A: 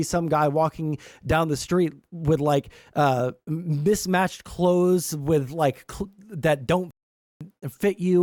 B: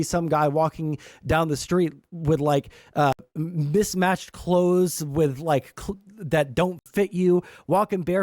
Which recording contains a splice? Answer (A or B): B